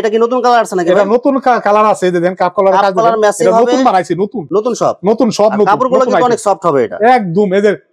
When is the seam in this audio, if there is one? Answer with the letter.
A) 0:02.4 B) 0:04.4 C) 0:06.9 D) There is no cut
D